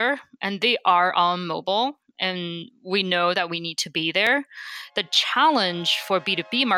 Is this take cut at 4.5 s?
no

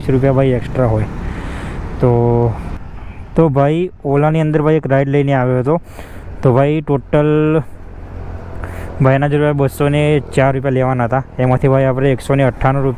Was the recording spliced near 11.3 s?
no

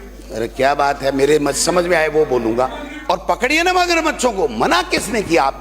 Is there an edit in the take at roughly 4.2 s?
no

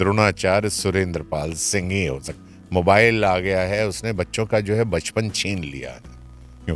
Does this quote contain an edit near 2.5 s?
yes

